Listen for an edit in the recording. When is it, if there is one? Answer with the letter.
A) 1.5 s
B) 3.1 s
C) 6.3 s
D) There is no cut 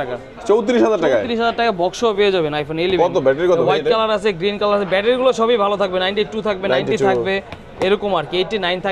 D